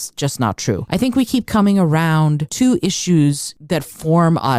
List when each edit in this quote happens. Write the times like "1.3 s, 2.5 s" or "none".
0.8 s, 2.4 s, 3.5 s